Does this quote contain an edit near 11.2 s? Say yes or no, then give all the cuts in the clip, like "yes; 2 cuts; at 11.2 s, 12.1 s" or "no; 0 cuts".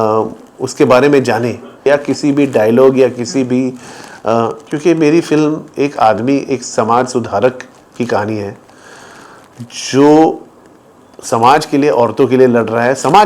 no; 1 cut; at 1.8 s